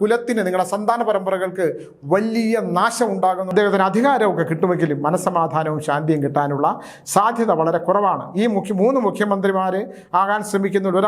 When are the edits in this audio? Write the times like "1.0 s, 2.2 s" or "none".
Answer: 3.5 s